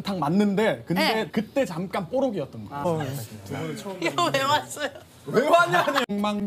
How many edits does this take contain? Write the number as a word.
one